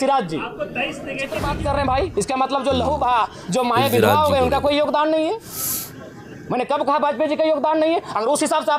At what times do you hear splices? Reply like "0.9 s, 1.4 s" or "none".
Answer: 1.4 s